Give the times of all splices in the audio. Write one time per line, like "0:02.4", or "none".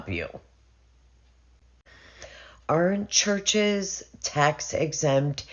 none